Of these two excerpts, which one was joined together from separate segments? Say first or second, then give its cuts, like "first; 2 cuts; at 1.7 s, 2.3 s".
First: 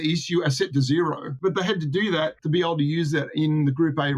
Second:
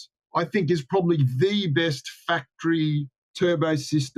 first; 2 cuts; at 1.4 s, 2.4 s